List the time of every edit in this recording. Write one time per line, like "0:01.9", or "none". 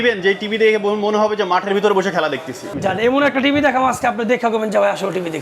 0:02.7